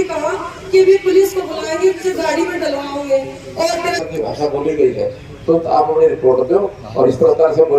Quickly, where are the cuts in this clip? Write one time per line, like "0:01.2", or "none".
0:04.0

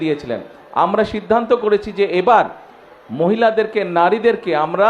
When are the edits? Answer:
none

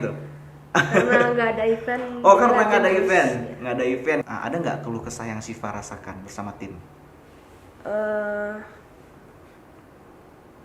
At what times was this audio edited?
0:04.2

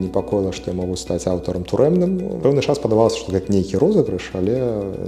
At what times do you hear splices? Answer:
0:02.3

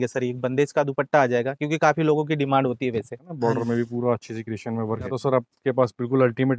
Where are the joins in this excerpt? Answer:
0:03.2
0:05.2

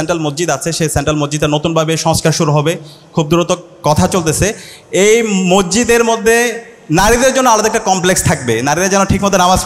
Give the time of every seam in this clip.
none

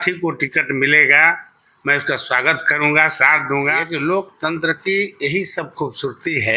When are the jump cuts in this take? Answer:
0:03.8

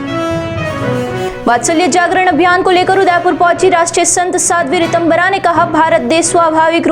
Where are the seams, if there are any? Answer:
none

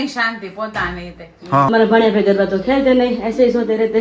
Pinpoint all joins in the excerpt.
0:01.7

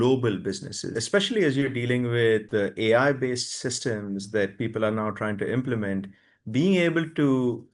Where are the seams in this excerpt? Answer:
0:00.9
0:02.5

